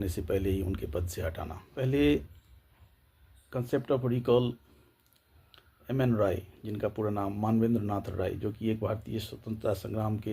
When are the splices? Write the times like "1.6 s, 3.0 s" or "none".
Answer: 1.8 s